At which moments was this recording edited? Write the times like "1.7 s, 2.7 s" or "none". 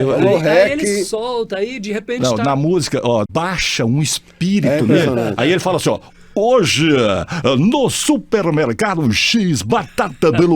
3.3 s